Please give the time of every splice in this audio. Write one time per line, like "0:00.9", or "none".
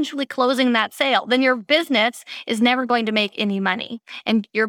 none

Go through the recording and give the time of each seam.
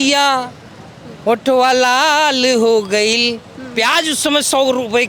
none

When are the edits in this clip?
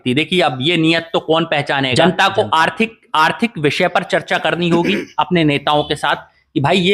0:01.9

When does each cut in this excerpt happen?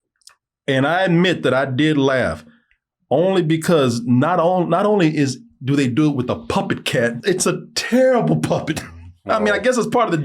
0:07.2

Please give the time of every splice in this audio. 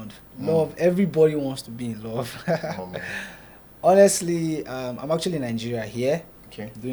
none

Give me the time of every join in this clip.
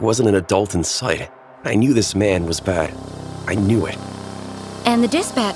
0:04.5

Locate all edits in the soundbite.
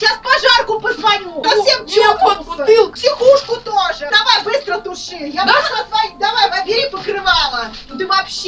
0:01.3
0:02.9
0:04.1

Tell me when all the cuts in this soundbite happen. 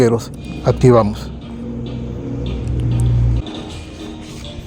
0:03.4

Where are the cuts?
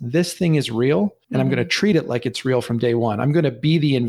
0:01.2

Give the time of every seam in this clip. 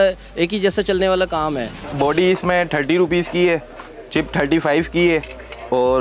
0:01.8

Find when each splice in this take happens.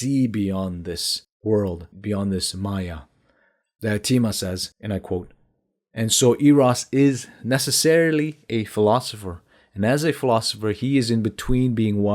0:01.9

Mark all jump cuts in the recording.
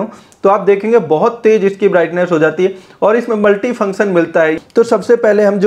0:04.5

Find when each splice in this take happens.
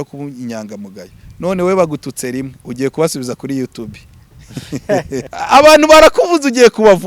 0:05.3

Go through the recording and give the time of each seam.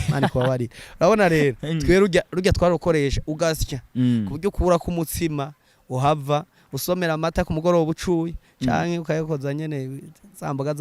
none

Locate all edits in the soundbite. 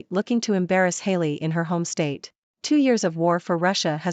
0:02.6

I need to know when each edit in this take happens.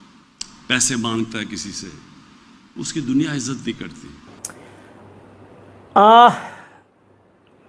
none

